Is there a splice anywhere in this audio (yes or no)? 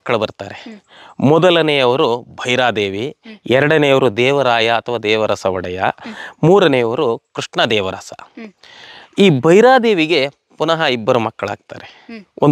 no